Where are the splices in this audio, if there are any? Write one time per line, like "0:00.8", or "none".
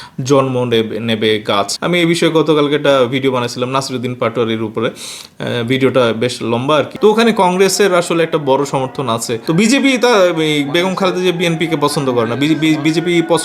0:01.8
0:06.9